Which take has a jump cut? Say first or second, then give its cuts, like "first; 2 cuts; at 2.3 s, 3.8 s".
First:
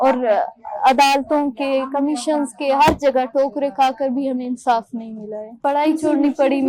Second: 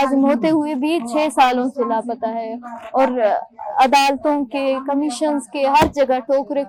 first; 1 cut; at 5.6 s